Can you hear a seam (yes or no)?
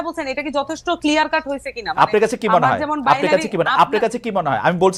no